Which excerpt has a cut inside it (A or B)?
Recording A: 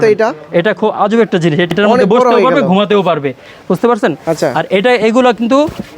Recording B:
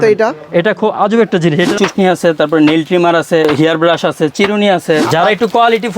B